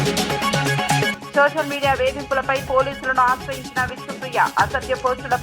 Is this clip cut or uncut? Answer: cut